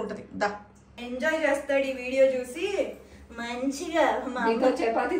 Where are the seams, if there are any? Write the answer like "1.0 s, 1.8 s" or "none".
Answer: none

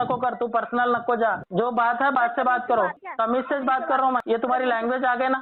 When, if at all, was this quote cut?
1.4 s, 3.0 s, 4.2 s

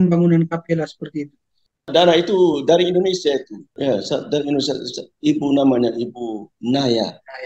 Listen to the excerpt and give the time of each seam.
1.9 s, 3.6 s

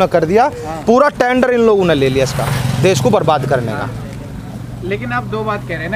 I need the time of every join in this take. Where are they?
none

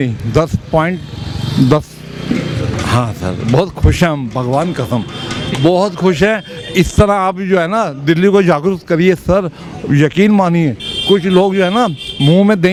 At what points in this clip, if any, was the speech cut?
none

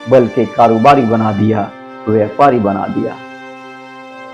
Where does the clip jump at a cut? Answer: none

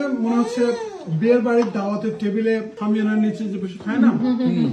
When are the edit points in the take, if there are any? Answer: 2.7 s

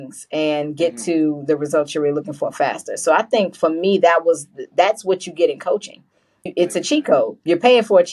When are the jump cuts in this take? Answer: none

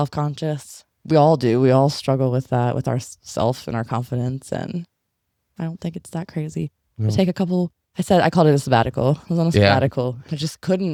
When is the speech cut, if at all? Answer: none

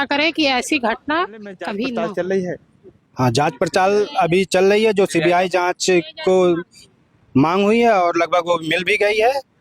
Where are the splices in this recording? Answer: 1.7 s

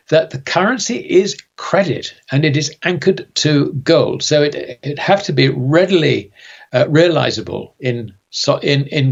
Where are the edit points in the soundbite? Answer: none

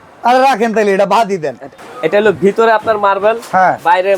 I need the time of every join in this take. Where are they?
1.7 s

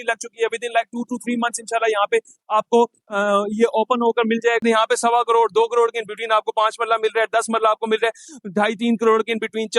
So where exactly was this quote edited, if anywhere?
4.6 s

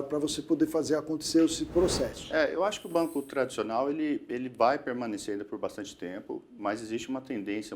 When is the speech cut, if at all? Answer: 2.2 s

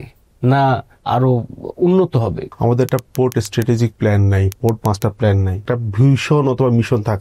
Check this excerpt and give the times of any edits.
1.0 s, 2.5 s, 4.5 s, 5.5 s

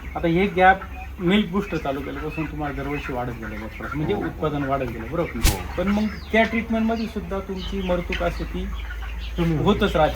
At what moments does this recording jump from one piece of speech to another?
5.7 s

